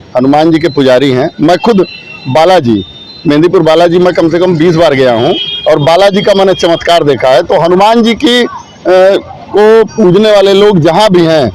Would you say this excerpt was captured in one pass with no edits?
yes; 0 cuts

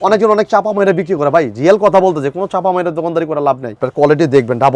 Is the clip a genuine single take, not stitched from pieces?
no; 1 cut; at 3.7 s

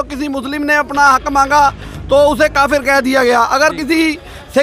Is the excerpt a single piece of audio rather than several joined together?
yes; 0 cuts

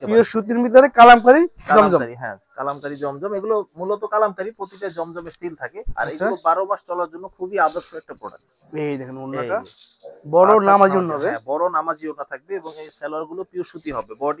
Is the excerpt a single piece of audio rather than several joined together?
yes; 0 cuts

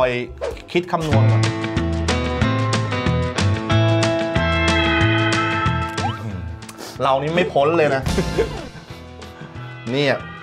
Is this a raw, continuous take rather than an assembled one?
yes; 0 cuts

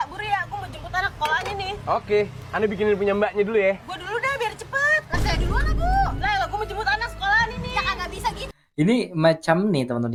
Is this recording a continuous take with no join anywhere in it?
yes; 0 cuts

